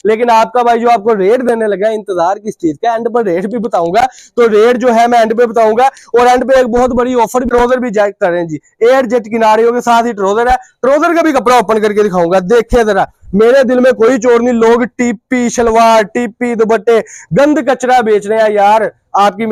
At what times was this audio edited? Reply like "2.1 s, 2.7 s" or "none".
none